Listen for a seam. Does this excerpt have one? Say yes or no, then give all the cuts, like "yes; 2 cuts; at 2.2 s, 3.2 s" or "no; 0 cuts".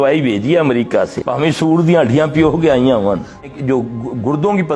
yes; 2 cuts; at 1.2 s, 3.6 s